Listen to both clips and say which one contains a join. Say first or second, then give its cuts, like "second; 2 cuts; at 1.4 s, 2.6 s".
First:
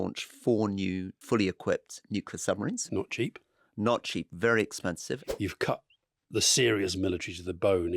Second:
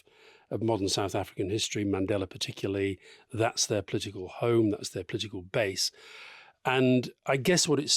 first; 3 cuts; at 1.1 s, 2.8 s, 5.2 s